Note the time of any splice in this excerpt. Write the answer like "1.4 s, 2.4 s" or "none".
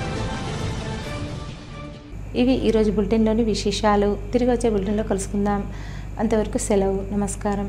none